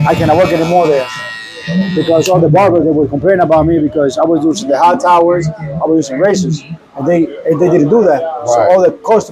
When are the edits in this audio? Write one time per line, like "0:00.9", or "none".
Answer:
none